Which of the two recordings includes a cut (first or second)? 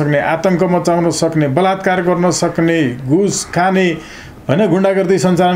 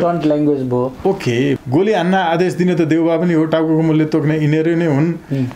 second